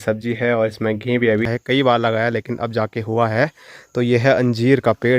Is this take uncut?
no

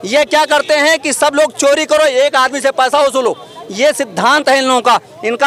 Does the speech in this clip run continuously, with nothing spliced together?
yes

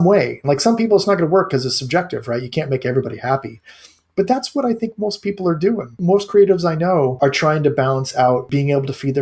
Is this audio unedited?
no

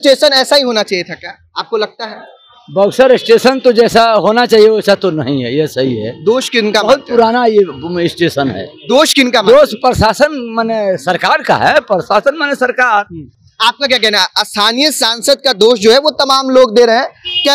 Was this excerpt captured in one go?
yes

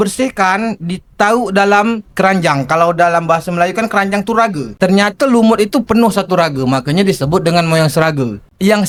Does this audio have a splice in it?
no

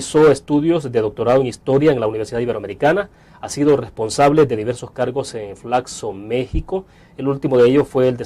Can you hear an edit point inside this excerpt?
yes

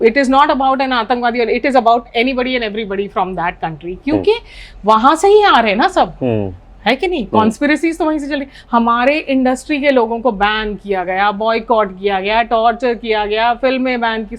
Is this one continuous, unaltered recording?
yes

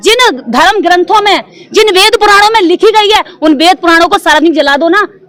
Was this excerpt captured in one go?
yes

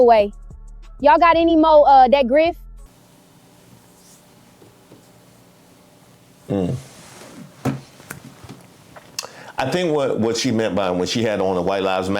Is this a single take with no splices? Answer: no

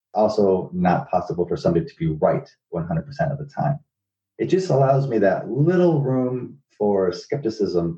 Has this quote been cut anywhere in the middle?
no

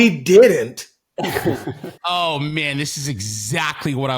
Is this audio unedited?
no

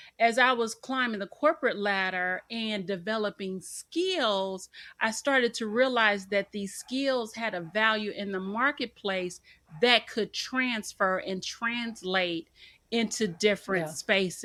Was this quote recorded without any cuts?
yes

